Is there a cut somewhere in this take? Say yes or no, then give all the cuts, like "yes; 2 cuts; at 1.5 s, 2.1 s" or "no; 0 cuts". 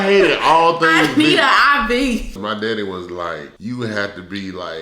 yes; 2 cuts; at 2.4 s, 3.5 s